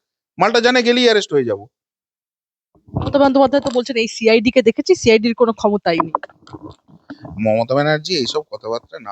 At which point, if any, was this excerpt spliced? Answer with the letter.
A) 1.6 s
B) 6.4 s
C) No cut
C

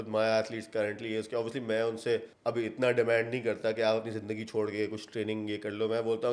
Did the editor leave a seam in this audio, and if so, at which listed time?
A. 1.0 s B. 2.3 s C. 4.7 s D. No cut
B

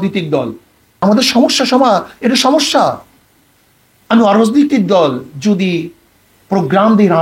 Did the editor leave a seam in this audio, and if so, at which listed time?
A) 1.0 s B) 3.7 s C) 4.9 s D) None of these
A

